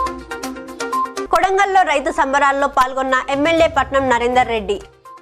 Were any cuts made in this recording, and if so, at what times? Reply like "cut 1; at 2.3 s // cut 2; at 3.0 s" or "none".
none